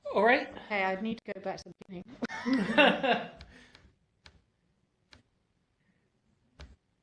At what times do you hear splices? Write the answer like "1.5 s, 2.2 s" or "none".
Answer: none